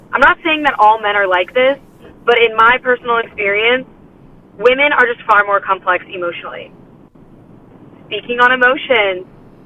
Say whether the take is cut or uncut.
uncut